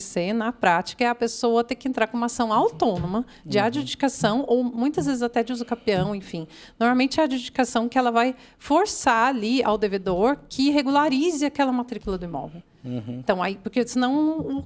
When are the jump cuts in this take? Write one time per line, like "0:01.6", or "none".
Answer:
none